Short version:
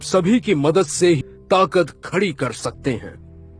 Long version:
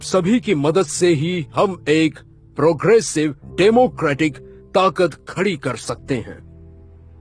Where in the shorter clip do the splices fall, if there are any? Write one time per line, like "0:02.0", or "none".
0:01.3